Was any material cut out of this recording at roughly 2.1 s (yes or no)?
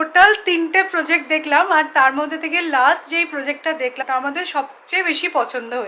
no